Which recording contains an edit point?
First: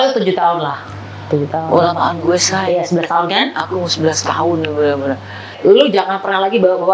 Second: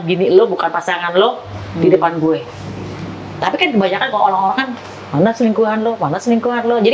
first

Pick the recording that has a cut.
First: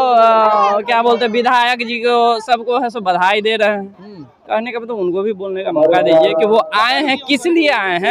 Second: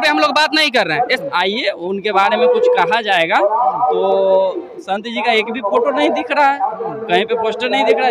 second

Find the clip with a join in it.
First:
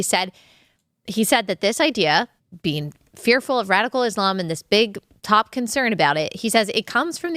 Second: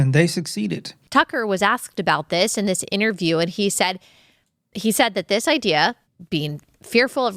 second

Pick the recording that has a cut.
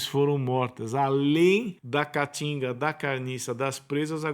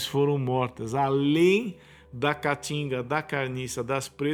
first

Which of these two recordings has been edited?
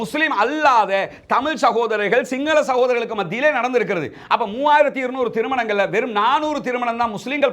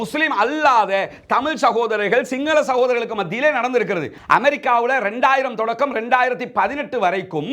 second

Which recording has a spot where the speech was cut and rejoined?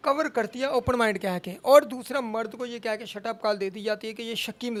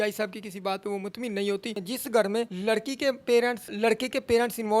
second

